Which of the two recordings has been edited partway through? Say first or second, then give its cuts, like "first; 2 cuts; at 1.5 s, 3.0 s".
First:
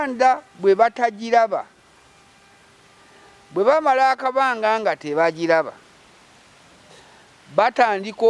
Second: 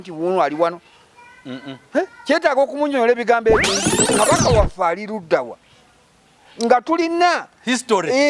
second; 1 cut; at 4.1 s